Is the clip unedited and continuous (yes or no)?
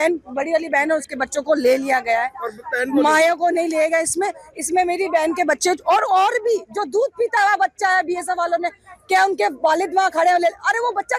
yes